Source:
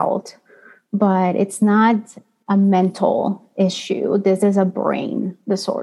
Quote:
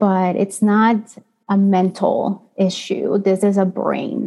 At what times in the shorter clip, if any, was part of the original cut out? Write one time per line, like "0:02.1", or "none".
none